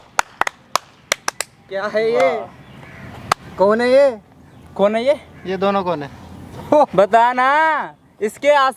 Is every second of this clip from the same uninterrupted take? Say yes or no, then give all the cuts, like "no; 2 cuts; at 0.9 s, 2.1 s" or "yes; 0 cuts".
yes; 0 cuts